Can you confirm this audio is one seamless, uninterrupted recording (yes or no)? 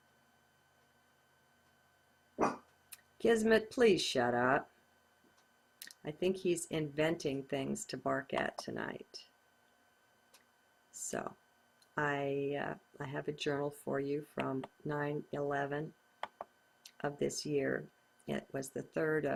yes